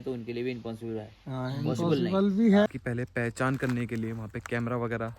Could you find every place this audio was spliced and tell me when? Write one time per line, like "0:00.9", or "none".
0:02.7